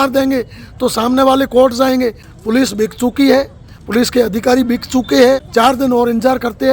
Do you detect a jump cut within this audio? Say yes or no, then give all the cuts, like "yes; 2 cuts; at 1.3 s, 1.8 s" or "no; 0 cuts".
yes; 2 cuts; at 2.2 s, 5.4 s